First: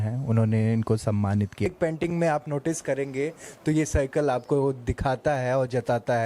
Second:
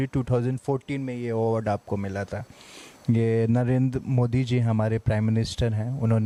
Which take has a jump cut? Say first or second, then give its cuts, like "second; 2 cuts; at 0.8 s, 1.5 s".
first; 1 cut; at 1.7 s